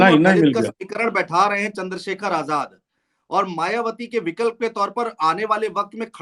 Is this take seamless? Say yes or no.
yes